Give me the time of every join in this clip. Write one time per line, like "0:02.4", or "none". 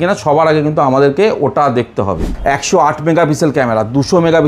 0:02.3